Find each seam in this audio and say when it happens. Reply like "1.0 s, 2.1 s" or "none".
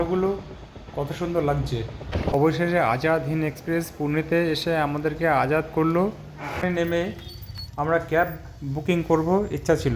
2.3 s, 6.6 s